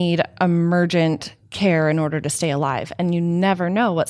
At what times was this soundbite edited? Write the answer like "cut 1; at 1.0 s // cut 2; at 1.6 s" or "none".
none